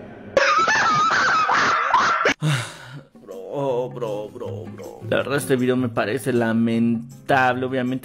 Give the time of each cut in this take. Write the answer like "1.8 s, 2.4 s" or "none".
none